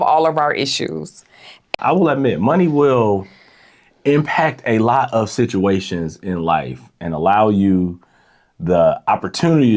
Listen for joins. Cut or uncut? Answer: cut